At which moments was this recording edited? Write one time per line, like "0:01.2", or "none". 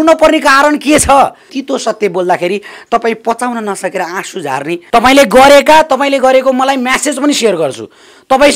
0:01.6
0:04.8